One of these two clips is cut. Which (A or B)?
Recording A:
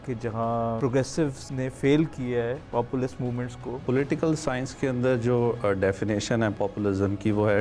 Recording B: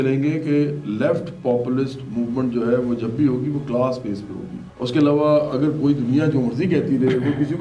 A